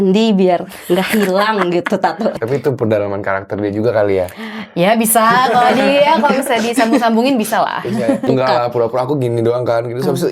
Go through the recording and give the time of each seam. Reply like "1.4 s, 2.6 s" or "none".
2.4 s, 8.2 s